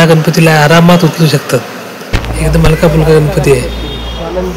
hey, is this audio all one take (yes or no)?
no